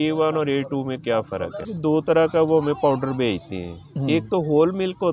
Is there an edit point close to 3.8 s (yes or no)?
no